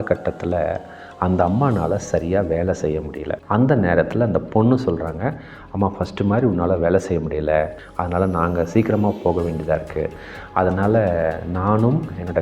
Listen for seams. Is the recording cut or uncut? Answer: cut